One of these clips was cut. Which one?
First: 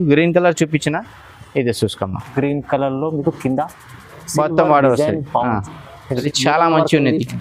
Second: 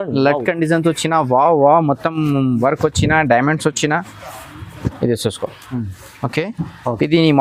first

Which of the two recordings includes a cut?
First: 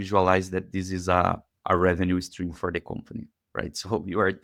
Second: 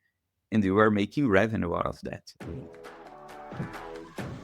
second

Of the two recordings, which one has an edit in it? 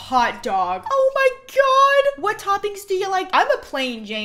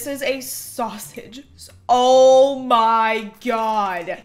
first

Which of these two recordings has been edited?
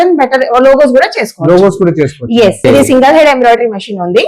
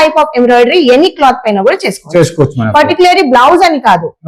first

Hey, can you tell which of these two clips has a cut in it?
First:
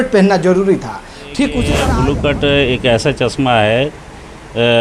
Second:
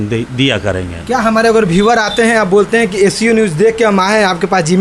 first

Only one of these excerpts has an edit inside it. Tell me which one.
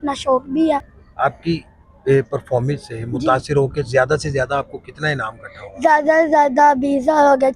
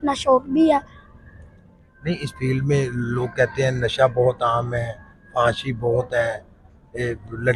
first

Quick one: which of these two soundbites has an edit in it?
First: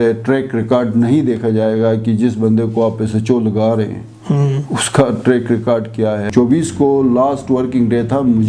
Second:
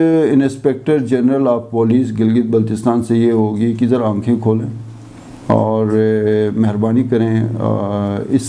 first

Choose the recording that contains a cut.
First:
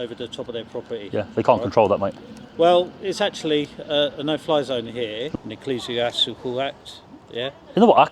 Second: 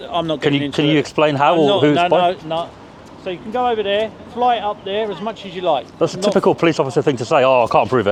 first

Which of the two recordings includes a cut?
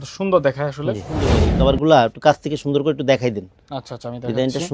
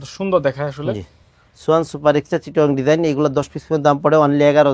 first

